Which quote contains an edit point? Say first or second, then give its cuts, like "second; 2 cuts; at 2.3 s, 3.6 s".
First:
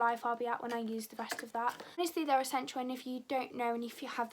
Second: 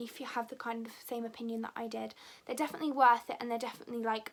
first; 1 cut; at 2.0 s